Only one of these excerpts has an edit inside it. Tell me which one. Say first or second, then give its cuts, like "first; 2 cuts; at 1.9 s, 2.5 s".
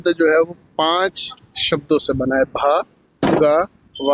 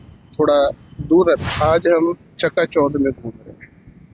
second; 1 cut; at 1.4 s